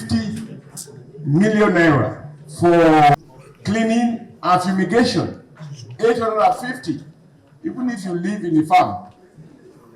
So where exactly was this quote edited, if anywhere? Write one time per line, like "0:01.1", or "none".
0:03.1